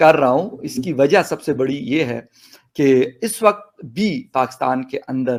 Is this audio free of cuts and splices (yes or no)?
yes